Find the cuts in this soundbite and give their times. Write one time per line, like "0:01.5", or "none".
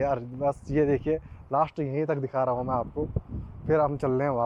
none